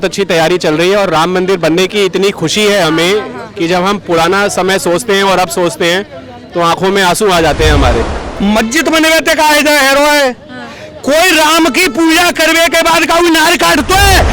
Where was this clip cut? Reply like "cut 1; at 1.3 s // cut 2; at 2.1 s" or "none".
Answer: cut 1; at 8.2 s